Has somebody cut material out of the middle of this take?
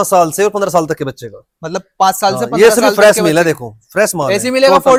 no; 0 cuts

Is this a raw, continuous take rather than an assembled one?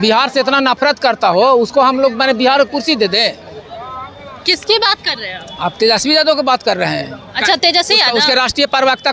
yes; 0 cuts

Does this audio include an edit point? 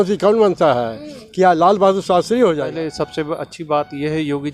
yes; 1 cut; at 2.7 s

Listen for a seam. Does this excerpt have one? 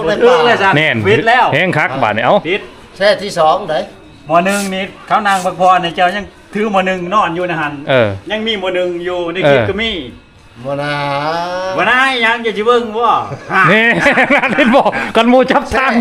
no; 0 cuts

